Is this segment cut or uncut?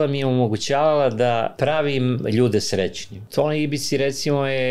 cut